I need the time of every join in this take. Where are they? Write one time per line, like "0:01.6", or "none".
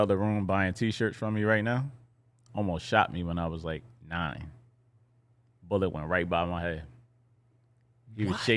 none